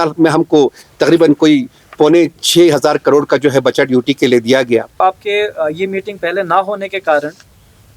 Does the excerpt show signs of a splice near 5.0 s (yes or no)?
yes